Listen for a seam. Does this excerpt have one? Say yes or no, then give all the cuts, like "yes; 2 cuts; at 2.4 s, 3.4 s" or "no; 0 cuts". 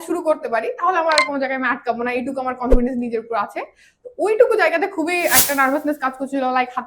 no; 0 cuts